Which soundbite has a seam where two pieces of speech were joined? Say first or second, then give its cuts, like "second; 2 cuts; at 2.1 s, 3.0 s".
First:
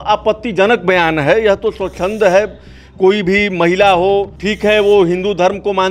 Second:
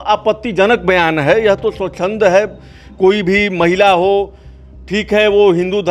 first; 1 cut; at 4.4 s